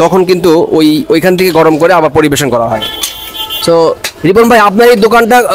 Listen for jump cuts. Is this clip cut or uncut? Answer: uncut